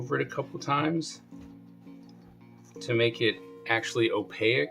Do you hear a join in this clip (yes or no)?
yes